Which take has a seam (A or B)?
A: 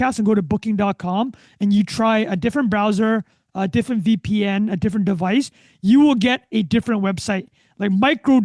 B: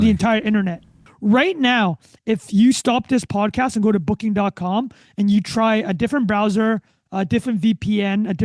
B